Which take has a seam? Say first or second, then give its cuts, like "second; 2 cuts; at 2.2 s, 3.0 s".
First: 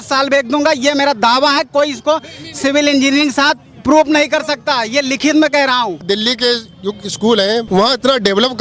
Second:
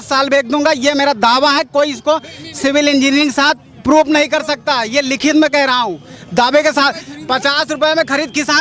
first; 2 cuts; at 6.0 s, 7.7 s